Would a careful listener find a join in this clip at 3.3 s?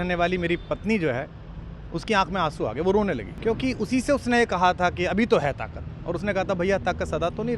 yes; 1 cut; at 3.3 s

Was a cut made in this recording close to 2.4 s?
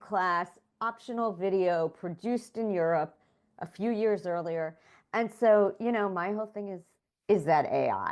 no; 0 cuts

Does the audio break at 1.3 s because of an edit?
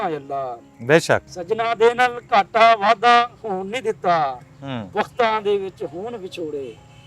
yes; 1 cut; at 1.3 s

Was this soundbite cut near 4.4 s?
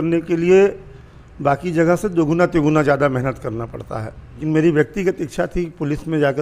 yes; 1 cut; at 4.4 s

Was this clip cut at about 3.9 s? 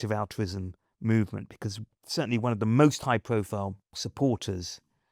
yes; 2 cuts; at 1.9 s, 3.9 s

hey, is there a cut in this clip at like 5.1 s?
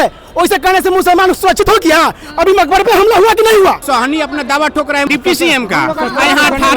yes; 2 cuts; at 3.8 s, 5.1 s

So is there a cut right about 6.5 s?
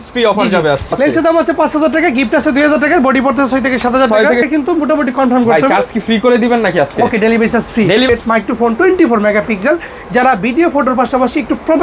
no; 3 cuts; at 0.9 s, 4.5 s, 8.1 s

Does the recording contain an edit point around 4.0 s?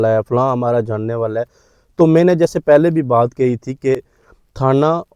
no; 0 cuts

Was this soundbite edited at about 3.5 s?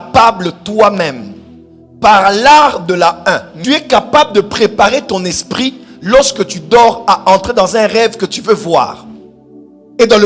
yes; 1 cut; at 3.5 s

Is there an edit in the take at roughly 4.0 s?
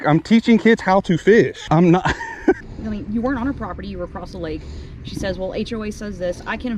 no; 1 cut; at 2.7 s

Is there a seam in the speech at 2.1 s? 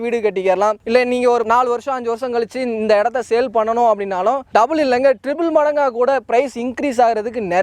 no; 0 cuts

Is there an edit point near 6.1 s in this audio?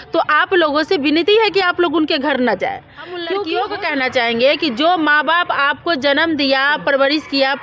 no; 1 cut; at 3.3 s

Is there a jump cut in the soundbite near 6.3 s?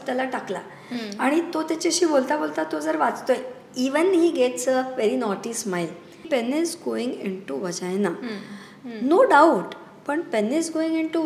yes; 1 cut; at 6.3 s

